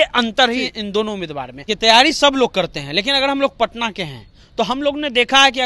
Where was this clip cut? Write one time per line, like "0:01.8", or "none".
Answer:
0:01.7